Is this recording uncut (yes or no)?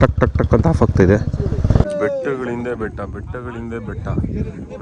no